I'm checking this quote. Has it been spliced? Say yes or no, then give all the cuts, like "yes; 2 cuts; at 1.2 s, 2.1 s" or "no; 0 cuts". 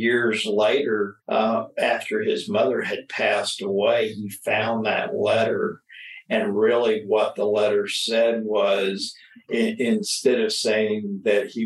no; 0 cuts